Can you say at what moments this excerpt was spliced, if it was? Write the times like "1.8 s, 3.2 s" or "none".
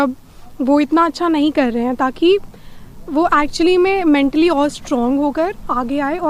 none